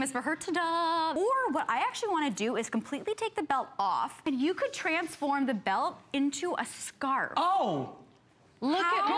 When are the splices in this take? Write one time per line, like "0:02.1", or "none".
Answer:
0:01.2
0:04.2

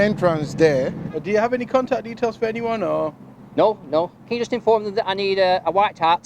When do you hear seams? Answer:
0:01.1
0:04.3

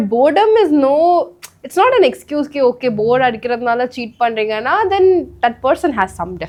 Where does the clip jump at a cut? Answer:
none

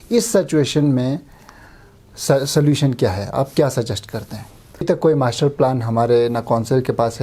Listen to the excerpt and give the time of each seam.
0:04.8

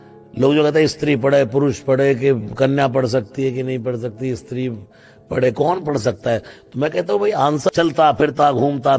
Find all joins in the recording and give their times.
0:07.7

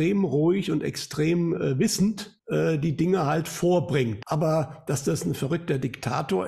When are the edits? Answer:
0:02.3
0:04.2

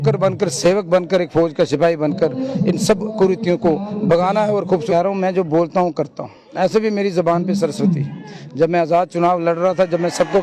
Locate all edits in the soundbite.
0:04.8

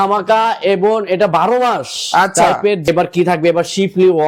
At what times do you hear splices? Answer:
0:02.9

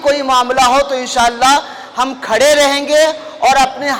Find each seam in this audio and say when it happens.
none

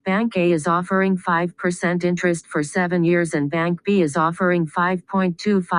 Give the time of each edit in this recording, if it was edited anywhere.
0:02.1

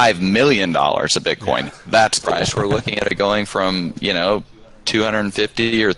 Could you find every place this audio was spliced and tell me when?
0:02.2

